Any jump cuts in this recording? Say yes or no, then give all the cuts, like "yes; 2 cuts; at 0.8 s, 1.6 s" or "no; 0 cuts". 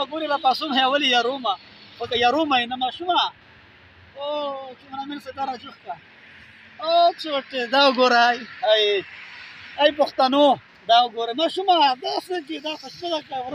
yes; 1 cut; at 2.0 s